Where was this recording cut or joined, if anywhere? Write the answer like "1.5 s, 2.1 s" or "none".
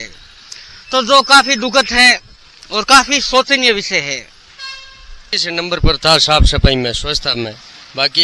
5.3 s